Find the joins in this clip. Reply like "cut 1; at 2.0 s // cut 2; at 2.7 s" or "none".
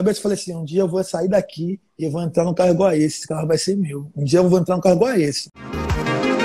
cut 1; at 5.5 s